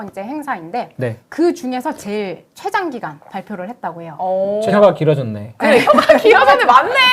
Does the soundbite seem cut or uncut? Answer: cut